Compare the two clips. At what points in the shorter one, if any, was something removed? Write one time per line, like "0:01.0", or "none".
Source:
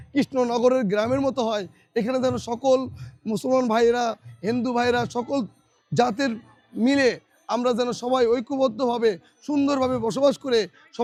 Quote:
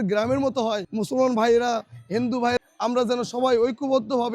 0:00.9
0:02.6